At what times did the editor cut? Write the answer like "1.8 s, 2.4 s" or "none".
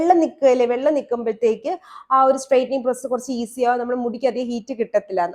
none